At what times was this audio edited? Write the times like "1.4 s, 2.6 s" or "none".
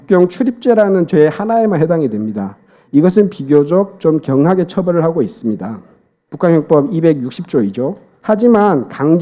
8.1 s